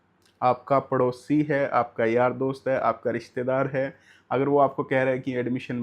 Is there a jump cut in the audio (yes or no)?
no